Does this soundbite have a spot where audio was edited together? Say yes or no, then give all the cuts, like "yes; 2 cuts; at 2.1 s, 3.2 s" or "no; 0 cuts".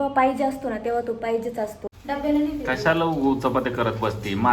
yes; 1 cut; at 1.9 s